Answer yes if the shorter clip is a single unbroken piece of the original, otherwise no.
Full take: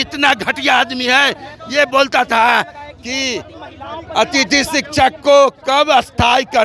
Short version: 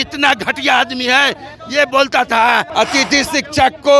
no